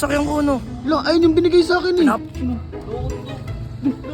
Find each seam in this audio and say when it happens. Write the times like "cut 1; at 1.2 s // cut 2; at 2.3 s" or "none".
cut 1; at 2.2 s